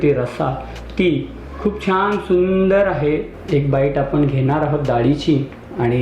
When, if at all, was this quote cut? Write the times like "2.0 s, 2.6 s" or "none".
3.4 s